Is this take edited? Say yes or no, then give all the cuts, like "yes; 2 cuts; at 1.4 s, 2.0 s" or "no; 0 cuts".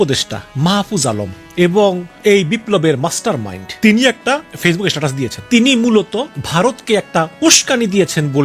yes; 6 cuts; at 1.4 s, 2.1 s, 3.6 s, 4.2 s, 5.4 s, 6.4 s